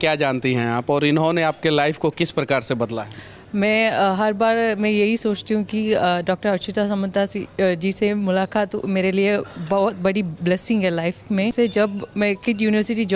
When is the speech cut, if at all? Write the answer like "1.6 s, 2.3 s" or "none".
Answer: 11.5 s